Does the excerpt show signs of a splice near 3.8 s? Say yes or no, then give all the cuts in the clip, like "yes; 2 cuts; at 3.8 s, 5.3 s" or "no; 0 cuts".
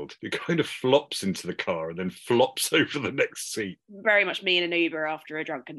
yes; 1 cut; at 3.8 s